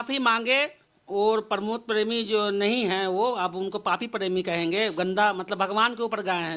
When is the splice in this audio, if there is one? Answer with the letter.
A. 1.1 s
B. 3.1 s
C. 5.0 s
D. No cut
D